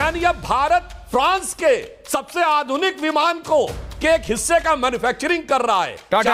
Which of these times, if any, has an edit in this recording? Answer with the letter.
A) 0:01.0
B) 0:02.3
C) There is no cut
A